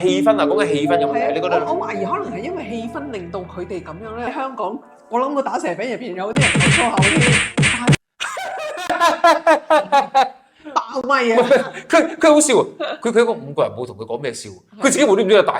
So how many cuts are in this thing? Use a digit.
2